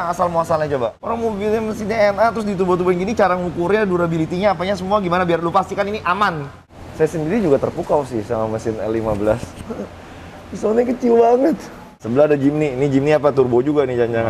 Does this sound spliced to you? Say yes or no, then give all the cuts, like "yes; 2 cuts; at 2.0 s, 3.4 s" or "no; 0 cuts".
yes; 3 cuts; at 1.0 s, 6.6 s, 11.9 s